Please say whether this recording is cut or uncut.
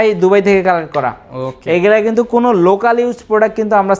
uncut